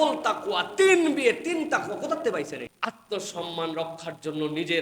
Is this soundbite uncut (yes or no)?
no